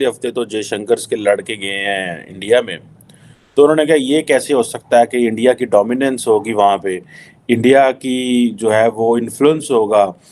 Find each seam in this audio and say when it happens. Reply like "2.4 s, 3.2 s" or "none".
none